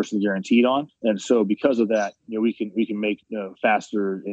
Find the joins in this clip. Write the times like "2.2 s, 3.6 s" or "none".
0.9 s, 2.2 s, 3.3 s